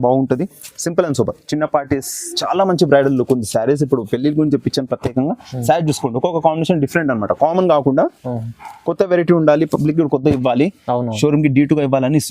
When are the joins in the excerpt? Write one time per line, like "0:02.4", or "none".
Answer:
0:02.2